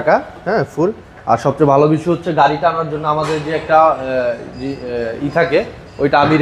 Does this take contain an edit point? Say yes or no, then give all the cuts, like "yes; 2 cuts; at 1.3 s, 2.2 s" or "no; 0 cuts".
no; 0 cuts